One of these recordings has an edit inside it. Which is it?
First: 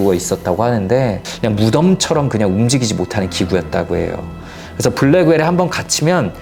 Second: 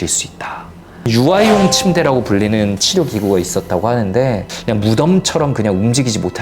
second; 1 cut; at 1.1 s

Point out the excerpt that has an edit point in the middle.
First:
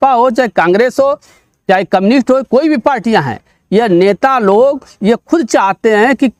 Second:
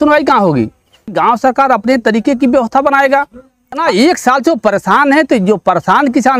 second; 2 cuts; at 1.1 s, 3.8 s

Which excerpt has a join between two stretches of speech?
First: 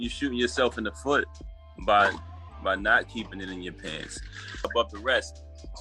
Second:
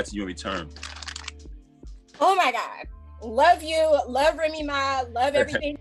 first; 1 cut; at 4.7 s

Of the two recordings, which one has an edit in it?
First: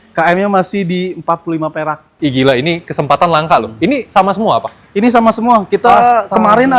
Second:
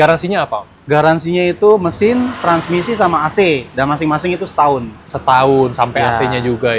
first; 1 cut; at 2.1 s

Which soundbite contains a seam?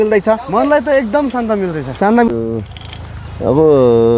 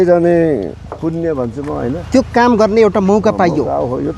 first; 1 cut; at 2.3 s

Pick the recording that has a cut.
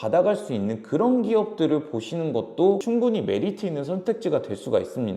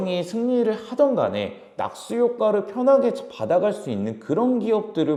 first; 1 cut; at 2.8 s

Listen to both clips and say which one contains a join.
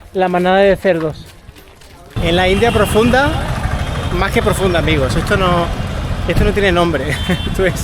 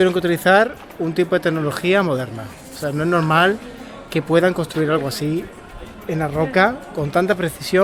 first; 1 cut; at 2.1 s

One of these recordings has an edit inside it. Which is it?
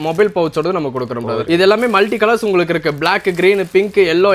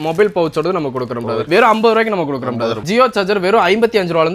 second; 2 cuts; at 1.4 s, 2.8 s

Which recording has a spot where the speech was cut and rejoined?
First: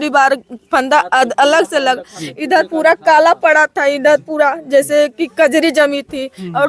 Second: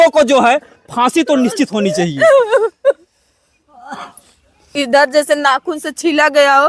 second; 1 cut; at 4.7 s

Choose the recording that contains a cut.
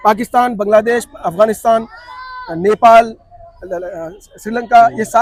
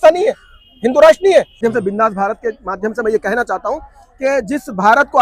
second; 1 cut; at 1.6 s

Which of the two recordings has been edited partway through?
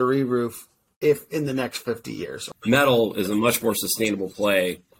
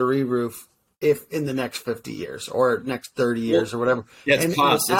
first; 1 cut; at 2.4 s

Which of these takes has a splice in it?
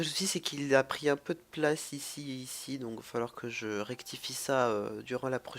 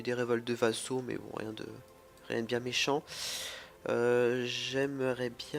first; 1 cut; at 2.2 s

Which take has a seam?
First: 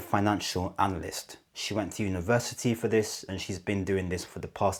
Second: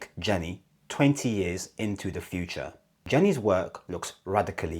second; 1 cut; at 2.9 s

